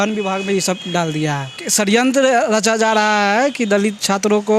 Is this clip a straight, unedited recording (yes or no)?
no